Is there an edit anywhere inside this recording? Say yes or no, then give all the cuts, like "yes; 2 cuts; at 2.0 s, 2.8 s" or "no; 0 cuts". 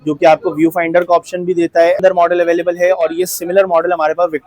yes; 1 cut; at 2.0 s